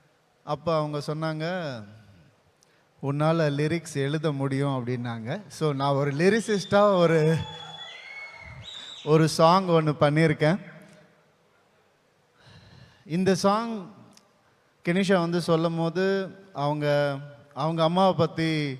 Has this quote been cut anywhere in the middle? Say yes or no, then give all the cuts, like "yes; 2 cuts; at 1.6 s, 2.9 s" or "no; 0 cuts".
no; 0 cuts